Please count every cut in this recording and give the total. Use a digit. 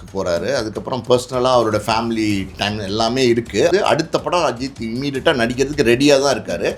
1